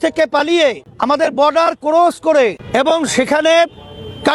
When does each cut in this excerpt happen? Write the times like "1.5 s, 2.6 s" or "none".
0.9 s, 2.6 s